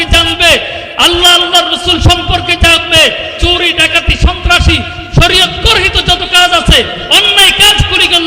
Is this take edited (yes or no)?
no